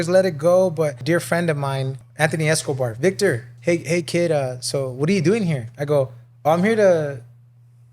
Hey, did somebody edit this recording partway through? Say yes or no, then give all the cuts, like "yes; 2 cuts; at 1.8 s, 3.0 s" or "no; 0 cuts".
yes; 3 cuts; at 1.0 s, 1.9 s, 3.5 s